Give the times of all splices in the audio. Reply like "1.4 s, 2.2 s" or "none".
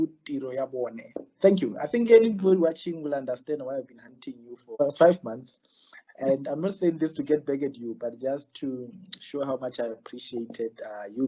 4.8 s